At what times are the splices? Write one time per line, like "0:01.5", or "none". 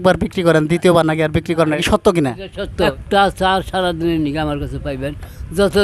0:01.8
0:03.0